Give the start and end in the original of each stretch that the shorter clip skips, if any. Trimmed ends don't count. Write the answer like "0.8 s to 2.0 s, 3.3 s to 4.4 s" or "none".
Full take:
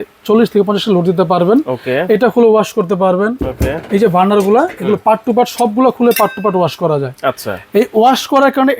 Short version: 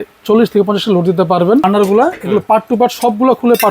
1.6 s to 4.2 s